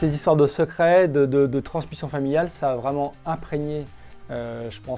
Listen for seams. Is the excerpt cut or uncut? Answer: uncut